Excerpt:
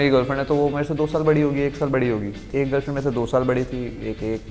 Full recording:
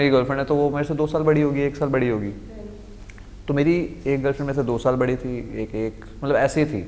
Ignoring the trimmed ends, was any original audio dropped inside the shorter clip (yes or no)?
yes